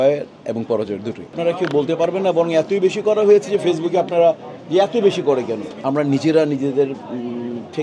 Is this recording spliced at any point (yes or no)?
yes